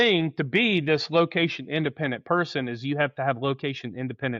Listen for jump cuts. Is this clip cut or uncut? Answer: uncut